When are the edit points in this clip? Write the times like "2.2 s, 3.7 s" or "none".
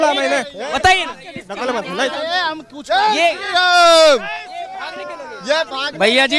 none

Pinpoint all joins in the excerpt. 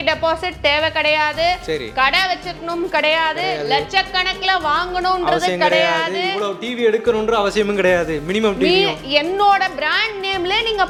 none

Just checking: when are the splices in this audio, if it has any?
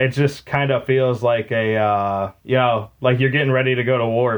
2.4 s

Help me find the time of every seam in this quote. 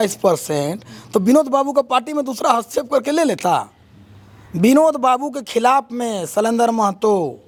none

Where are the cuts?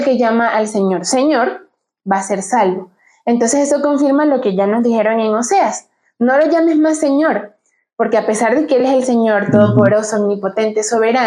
none

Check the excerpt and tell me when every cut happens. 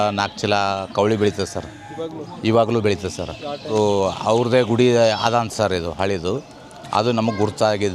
3.7 s

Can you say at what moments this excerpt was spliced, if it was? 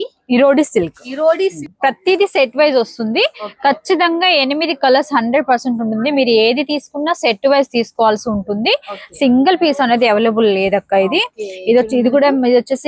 1.7 s

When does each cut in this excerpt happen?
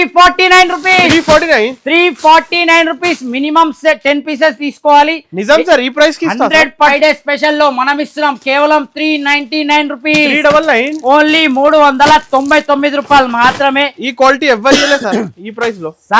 6.9 s

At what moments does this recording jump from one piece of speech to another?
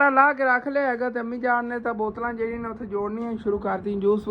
none

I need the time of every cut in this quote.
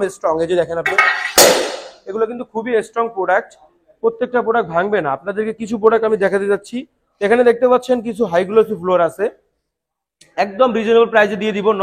none

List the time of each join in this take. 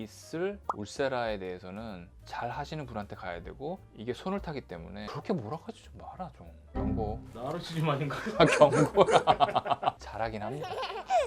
5.1 s

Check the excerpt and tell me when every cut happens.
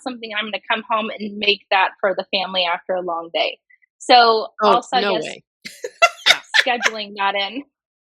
none

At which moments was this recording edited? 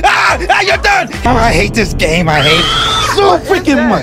1.2 s

